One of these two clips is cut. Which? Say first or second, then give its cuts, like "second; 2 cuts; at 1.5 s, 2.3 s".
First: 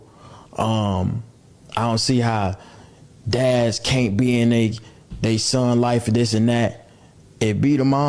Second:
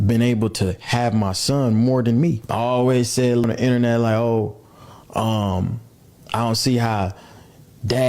second; 2 cuts; at 2.4 s, 3.5 s